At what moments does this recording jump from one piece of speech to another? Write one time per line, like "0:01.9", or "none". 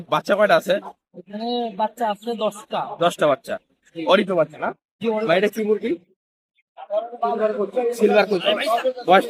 0:05.2